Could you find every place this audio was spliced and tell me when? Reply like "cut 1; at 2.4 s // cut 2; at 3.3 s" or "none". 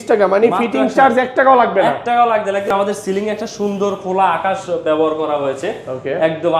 cut 1; at 2.7 s